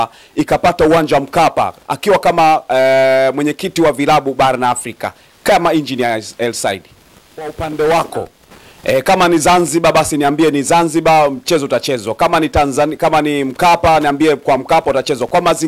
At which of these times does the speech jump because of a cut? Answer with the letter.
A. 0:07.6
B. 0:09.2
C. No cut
A